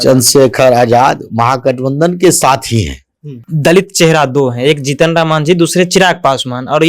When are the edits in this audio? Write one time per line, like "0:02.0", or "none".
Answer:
0:03.4